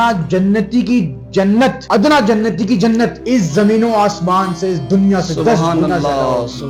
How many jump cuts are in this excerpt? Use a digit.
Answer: 0